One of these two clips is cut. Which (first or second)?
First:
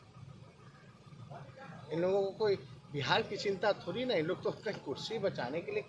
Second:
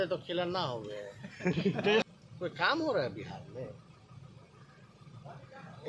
second